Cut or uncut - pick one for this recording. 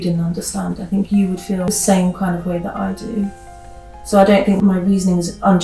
cut